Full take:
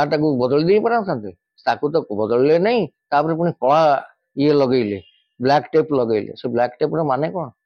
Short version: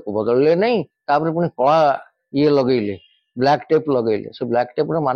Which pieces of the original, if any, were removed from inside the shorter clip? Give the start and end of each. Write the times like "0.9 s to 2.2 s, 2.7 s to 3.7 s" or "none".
none